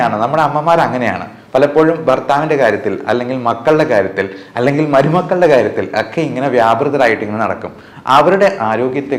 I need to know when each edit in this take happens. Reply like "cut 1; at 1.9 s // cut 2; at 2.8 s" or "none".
none